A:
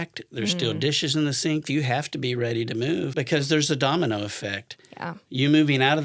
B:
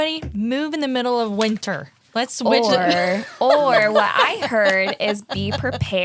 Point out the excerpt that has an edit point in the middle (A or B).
A